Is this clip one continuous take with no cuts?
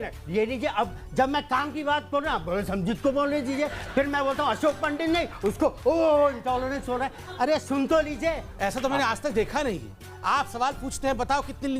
no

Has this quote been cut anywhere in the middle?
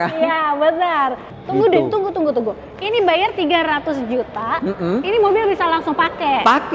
yes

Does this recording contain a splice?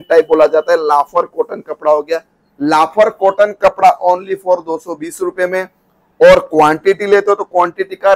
no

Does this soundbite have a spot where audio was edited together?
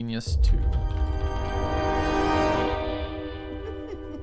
no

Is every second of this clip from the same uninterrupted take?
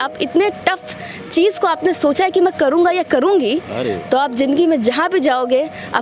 yes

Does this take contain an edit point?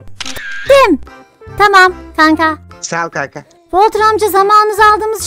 no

